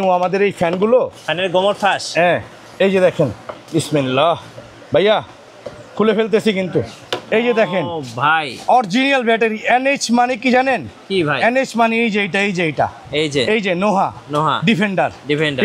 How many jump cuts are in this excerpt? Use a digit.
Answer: 0